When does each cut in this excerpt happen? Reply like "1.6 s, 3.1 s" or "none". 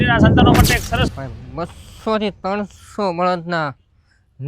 1.1 s